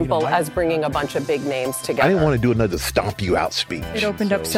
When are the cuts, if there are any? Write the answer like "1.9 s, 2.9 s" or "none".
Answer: none